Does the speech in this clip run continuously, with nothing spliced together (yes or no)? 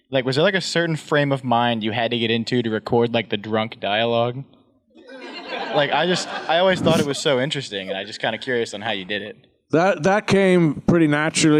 yes